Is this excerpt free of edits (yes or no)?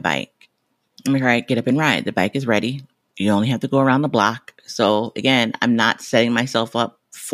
yes